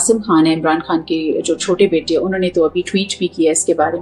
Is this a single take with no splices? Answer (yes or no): yes